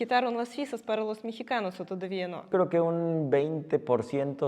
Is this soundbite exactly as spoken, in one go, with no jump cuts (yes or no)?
no